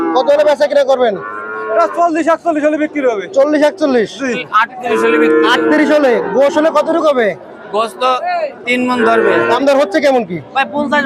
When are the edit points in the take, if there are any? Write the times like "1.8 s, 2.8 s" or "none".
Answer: 4.5 s, 9.5 s